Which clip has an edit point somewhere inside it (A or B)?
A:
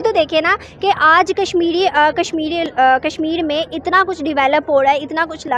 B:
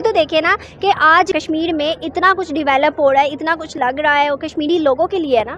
B